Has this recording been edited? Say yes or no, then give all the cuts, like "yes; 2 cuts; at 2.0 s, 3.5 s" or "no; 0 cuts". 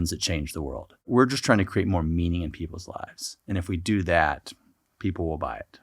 yes; 1 cut; at 1.1 s